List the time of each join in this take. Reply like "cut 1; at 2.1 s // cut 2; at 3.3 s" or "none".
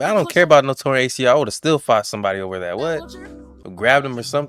none